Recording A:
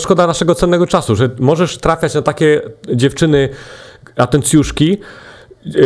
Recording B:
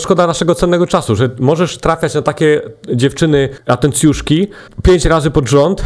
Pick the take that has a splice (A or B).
B